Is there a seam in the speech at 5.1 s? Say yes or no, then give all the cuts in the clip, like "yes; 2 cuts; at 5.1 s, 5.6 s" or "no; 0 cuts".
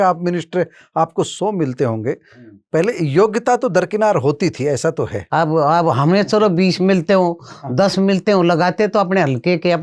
yes; 1 cut; at 5.1 s